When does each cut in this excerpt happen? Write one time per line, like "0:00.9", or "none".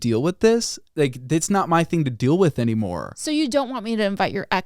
none

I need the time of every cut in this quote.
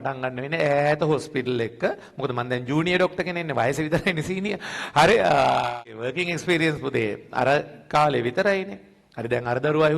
0:05.8

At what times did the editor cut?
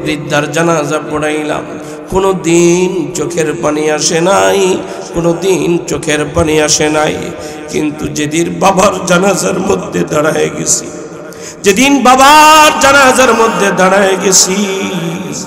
none

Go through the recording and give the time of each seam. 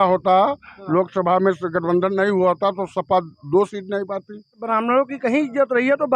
0:04.6

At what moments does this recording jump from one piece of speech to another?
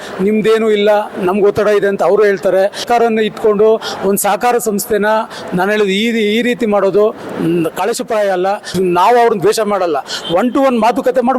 0:02.8
0:08.7

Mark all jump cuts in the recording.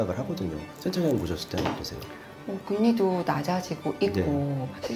none

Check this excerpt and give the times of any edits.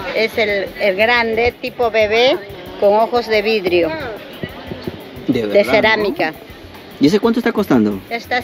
none

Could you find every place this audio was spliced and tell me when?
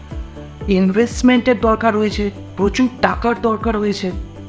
none

